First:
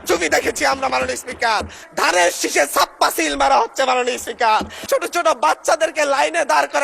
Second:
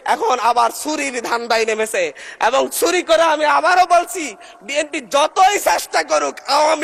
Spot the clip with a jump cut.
first; 2 cuts; at 1.8 s, 4.8 s

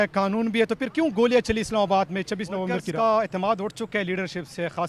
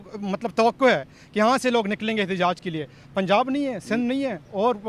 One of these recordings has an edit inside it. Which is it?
first; 1 cut; at 2.8 s

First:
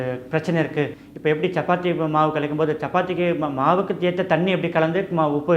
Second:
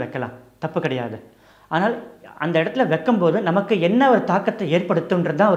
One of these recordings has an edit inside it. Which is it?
first; 1 cut; at 1.0 s

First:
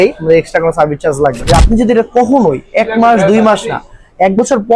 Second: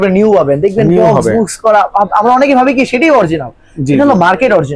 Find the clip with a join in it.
first; 1 cut; at 1.4 s

